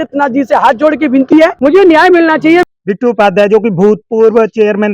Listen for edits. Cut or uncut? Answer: cut